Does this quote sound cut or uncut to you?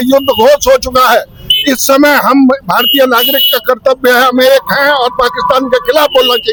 uncut